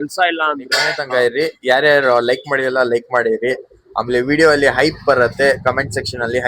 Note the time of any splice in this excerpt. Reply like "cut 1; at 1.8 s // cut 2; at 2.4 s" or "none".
cut 1; at 1.0 s